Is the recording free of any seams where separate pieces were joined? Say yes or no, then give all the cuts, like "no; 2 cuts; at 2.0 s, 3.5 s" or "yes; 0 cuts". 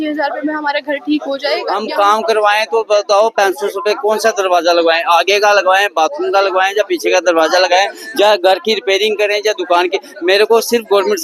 no; 1 cut; at 1.7 s